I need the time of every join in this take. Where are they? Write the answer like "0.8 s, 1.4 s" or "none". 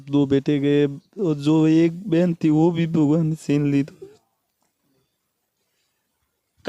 none